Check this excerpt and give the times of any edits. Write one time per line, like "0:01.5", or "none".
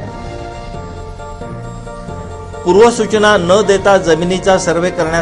none